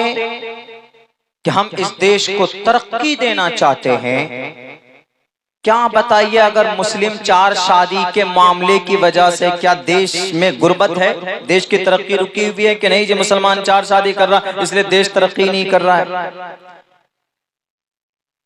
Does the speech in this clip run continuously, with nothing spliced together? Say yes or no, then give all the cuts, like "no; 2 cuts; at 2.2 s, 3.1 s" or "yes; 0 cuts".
yes; 0 cuts